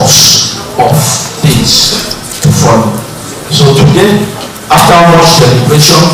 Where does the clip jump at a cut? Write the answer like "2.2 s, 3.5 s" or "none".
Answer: 4.0 s